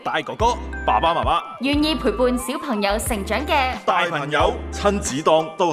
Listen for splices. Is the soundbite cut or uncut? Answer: cut